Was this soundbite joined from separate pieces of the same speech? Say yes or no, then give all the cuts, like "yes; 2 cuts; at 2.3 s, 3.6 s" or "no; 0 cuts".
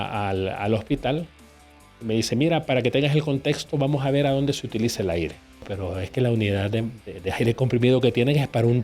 yes; 1 cut; at 5.7 s